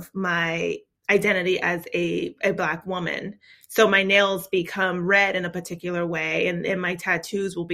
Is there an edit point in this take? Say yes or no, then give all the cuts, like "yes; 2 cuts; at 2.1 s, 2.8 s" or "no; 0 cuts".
yes; 1 cut; at 0.9 s